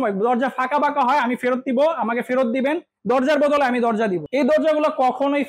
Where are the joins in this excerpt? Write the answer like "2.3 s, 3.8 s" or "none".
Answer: 4.2 s